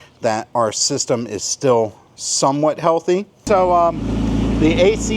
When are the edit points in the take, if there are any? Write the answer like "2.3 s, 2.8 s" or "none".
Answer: 3.3 s